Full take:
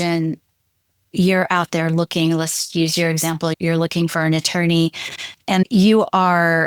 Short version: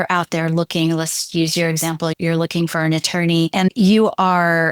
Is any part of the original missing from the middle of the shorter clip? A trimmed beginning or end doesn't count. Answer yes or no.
yes